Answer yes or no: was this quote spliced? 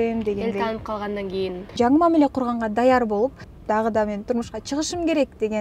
yes